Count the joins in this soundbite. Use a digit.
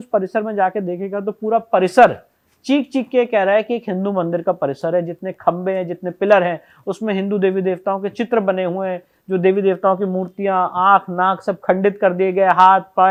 0